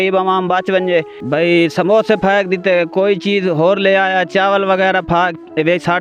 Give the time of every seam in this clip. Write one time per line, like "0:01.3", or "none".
0:01.2